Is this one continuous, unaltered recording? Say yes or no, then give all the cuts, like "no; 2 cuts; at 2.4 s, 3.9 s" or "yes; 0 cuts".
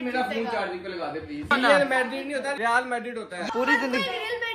no; 2 cuts; at 1.5 s, 2.8 s